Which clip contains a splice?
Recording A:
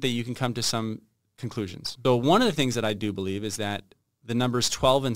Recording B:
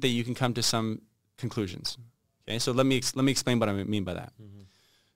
A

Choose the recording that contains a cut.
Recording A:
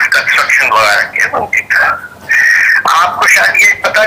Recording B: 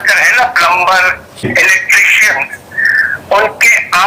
B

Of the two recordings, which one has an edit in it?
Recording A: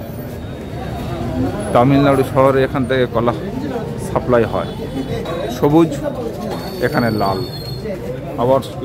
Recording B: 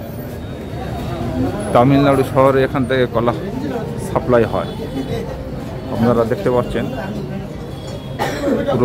A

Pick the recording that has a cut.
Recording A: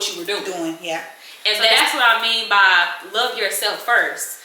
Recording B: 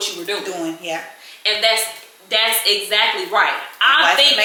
A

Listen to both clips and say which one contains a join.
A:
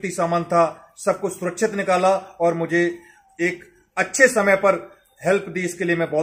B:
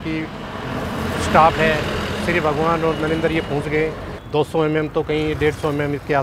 B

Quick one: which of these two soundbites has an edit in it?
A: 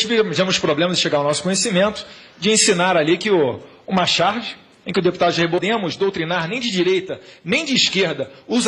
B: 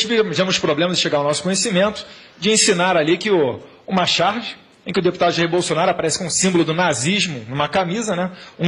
B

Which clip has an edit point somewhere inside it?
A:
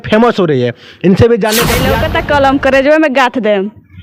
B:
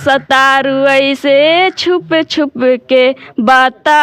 A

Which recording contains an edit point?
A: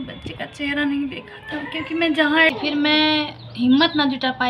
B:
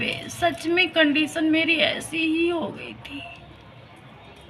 A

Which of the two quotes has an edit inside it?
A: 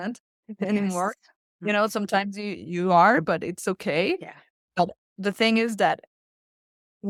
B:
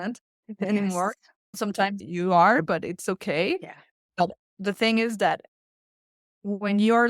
B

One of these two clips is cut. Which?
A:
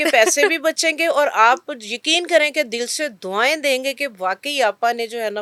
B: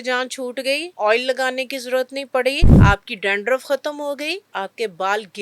B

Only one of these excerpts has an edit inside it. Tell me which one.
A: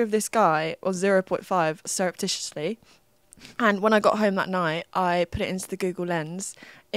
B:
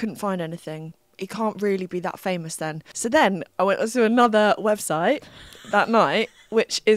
B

